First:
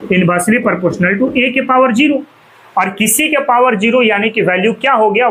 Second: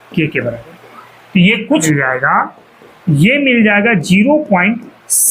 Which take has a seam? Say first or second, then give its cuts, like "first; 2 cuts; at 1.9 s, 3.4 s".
second; 1 cut; at 1.8 s